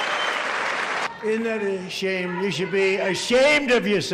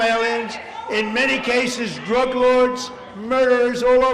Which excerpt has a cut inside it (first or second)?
first